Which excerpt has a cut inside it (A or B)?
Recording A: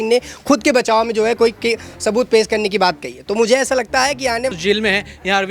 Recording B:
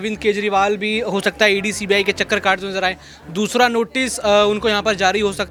A